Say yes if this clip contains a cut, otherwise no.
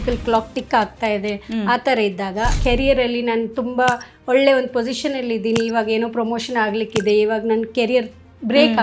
yes